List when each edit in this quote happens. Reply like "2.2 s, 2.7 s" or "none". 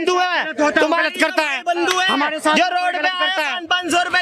none